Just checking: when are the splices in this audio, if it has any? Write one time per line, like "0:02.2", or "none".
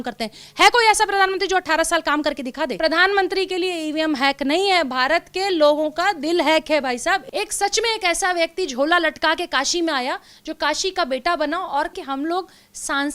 0:02.7
0:07.3
0:11.9